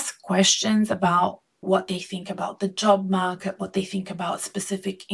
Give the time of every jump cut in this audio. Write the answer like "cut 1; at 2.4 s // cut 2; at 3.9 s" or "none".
cut 1; at 1.6 s